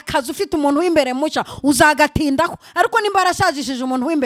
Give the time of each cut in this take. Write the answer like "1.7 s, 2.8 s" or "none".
none